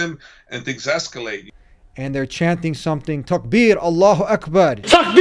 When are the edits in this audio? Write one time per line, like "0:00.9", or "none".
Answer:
0:01.5